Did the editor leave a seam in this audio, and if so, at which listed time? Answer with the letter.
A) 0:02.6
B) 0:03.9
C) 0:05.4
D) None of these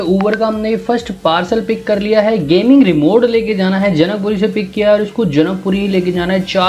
D